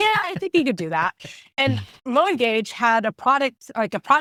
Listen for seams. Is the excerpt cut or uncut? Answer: uncut